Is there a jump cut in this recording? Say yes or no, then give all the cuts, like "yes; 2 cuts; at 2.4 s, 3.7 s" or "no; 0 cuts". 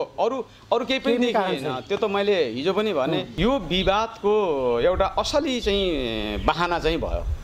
yes; 1 cut; at 3.3 s